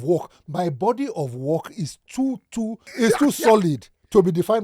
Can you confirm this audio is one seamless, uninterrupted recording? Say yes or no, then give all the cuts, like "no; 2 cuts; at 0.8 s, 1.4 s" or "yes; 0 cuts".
no; 1 cut; at 2.8 s